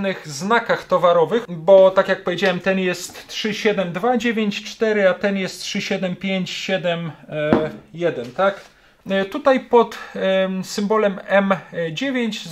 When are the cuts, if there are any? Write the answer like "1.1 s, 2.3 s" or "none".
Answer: 1.5 s, 8.9 s

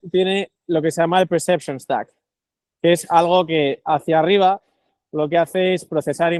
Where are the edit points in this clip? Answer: none

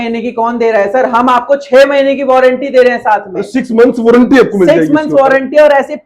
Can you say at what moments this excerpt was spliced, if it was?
none

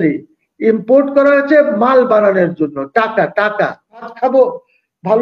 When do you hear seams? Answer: 4.1 s

